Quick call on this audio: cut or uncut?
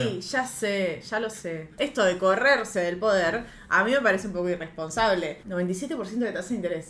cut